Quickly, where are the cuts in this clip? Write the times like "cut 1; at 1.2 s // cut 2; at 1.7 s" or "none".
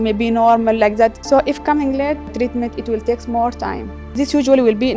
cut 1; at 1.2 s // cut 2; at 2.3 s // cut 3; at 4.1 s